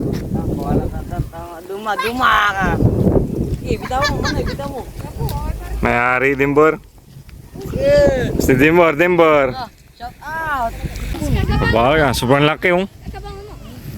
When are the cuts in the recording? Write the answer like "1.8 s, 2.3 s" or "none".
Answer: 11.1 s